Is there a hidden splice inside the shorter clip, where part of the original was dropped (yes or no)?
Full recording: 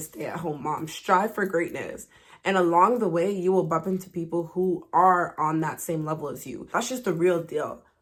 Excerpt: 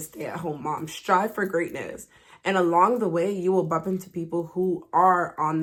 no